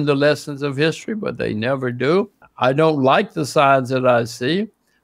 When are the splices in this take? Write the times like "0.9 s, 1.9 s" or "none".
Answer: 2.4 s